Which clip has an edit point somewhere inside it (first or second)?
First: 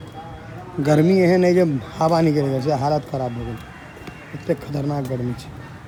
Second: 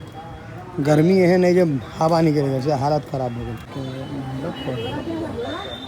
second